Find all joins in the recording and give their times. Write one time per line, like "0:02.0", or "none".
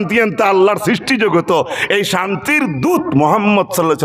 none